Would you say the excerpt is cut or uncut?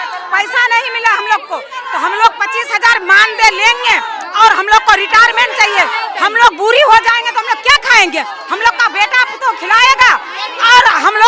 uncut